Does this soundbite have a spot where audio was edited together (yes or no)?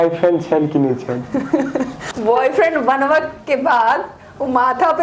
yes